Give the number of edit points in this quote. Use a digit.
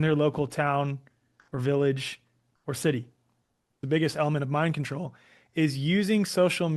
1